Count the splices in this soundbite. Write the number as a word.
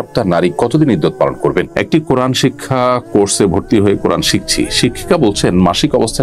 one